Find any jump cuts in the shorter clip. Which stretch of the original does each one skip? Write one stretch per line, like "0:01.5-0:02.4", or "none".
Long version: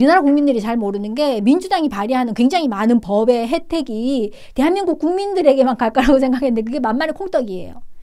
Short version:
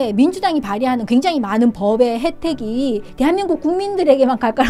0:04.3-0:04.4

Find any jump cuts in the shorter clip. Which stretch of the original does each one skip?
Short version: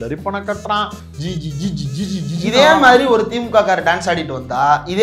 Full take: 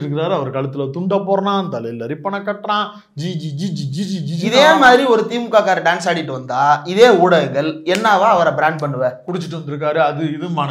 none

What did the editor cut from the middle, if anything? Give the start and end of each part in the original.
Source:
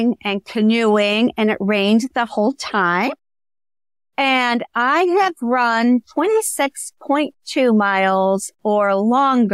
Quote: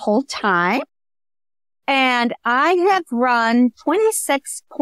none

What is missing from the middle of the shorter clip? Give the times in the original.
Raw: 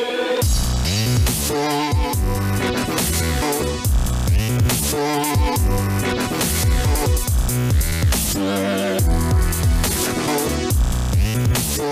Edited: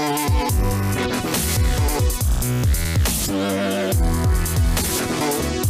0:03.0-0:06.4

